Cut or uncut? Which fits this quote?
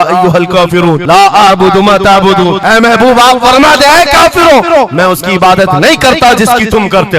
uncut